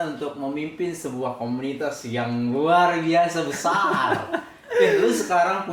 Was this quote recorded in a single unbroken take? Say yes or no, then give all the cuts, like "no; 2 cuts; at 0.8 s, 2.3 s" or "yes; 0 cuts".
yes; 0 cuts